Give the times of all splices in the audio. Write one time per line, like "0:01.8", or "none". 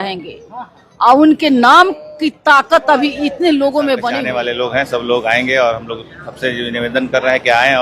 0:04.1